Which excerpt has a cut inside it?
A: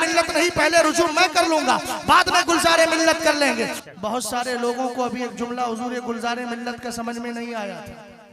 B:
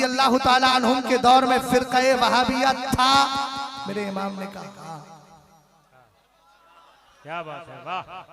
A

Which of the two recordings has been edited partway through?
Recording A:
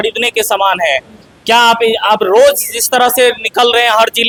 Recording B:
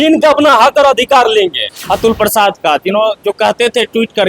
B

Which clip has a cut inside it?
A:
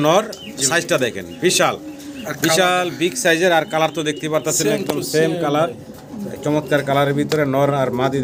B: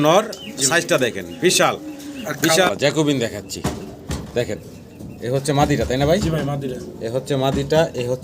B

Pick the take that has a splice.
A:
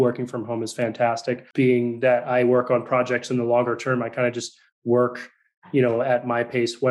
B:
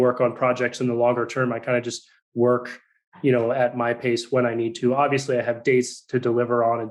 A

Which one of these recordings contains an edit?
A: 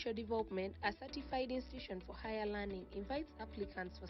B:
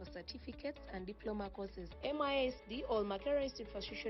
B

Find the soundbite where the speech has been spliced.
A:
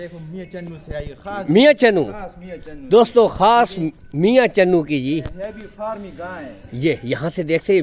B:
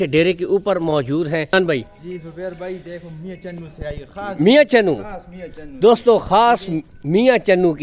B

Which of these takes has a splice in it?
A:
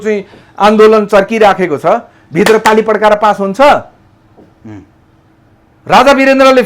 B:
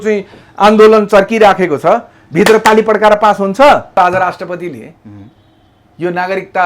B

